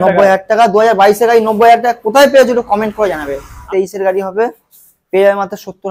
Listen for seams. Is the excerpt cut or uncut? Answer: cut